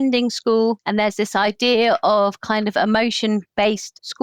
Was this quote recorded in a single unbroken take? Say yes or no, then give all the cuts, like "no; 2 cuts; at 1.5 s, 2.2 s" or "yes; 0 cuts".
yes; 0 cuts